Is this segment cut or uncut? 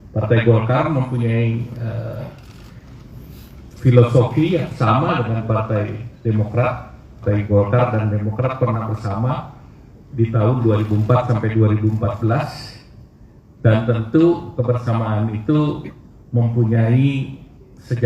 cut